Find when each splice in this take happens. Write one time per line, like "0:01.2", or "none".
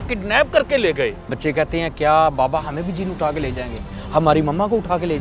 0:01.3

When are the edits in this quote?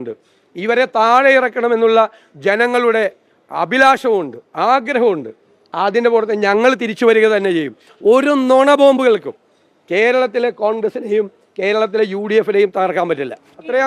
0:07.9

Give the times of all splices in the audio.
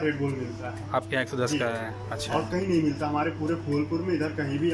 none

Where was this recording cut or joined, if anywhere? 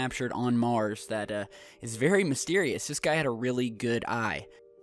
0:01.3

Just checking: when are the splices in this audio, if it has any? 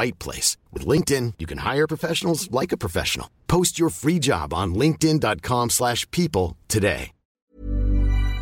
0:07.4

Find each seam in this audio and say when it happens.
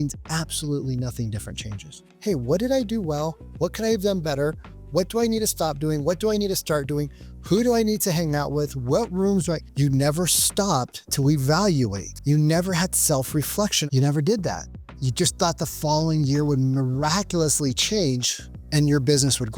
0:02.0
0:09.7
0:12.1
0:13.8

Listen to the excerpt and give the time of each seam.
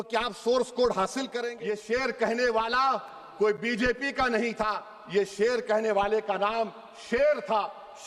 0:01.4

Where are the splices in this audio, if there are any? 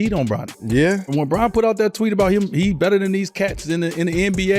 none

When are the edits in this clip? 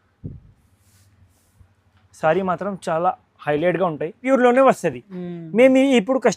0:04.2

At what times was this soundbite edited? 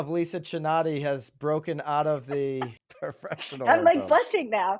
0:02.8

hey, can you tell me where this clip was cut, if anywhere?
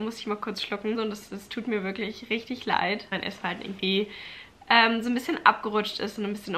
0:01.0
0:03.1

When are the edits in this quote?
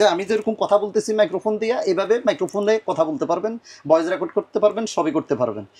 none

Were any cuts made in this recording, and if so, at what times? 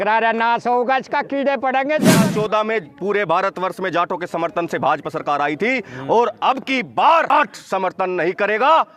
0:02.2
0:07.3

